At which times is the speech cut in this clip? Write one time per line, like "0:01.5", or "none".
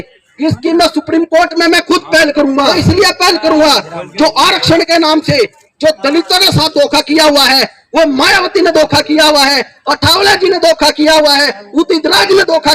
0:02.7